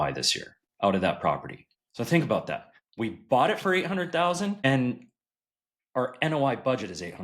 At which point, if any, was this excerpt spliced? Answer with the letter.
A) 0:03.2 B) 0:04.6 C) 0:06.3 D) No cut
B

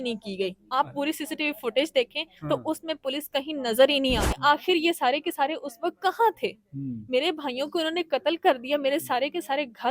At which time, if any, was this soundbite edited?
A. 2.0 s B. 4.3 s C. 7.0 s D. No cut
B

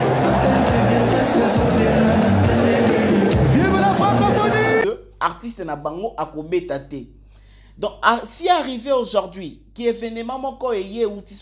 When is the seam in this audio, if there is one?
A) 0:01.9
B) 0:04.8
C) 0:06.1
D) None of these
B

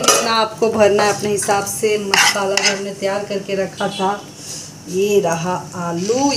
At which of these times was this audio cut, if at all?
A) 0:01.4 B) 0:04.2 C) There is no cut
C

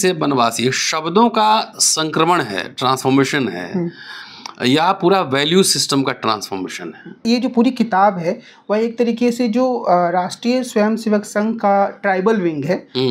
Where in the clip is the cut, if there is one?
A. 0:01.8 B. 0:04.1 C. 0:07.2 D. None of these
C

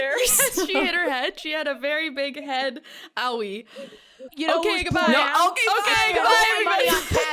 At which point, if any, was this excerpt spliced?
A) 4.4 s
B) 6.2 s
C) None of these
A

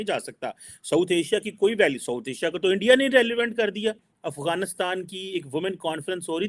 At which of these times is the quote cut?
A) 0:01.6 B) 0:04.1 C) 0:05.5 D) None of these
B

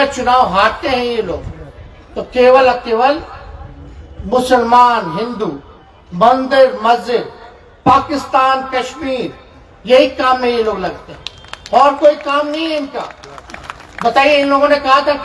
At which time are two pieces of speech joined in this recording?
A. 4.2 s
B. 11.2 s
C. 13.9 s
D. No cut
D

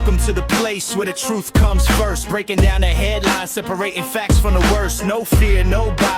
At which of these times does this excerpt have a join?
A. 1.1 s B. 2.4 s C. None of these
C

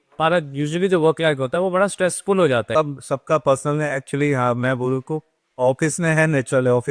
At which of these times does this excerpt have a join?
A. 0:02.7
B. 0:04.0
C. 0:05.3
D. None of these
A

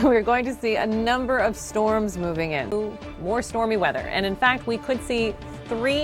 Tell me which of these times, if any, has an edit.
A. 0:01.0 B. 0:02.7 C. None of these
B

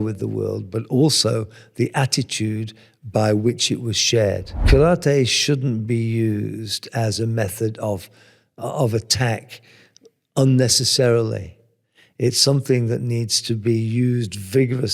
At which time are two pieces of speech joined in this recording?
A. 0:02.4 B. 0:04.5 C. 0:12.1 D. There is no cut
B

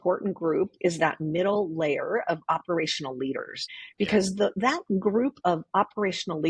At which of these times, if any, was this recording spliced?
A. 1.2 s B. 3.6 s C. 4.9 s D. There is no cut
B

